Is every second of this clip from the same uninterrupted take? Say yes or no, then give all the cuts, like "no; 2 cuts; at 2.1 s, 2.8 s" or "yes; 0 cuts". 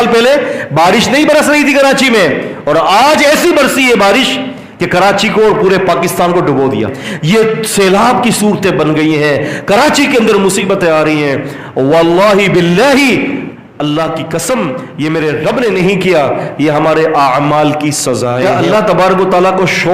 no; 2 cuts; at 7.1 s, 18.5 s